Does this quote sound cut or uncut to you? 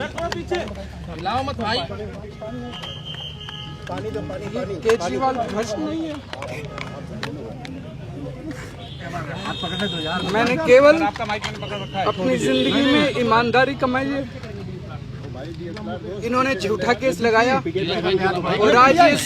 uncut